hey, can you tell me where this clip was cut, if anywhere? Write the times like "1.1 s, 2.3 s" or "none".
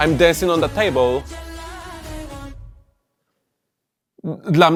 none